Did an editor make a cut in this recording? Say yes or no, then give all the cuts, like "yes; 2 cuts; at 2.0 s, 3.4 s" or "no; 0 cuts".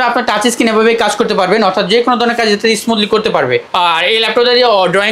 no; 0 cuts